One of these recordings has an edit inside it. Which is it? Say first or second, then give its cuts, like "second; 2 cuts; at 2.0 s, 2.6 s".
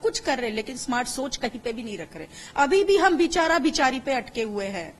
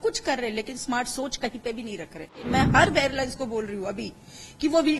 second; 1 cut; at 2.5 s